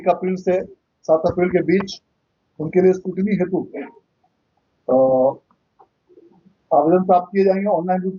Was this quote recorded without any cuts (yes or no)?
yes